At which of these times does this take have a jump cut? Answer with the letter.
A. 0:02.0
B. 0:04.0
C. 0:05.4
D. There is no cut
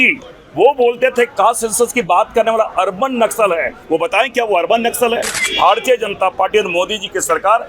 C